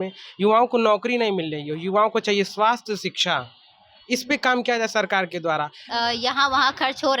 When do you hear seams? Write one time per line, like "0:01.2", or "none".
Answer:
0:05.8